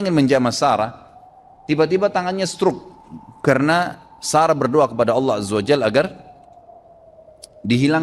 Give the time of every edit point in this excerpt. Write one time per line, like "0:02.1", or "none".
none